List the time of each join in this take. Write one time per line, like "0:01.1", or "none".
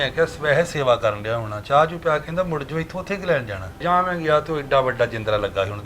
0:03.8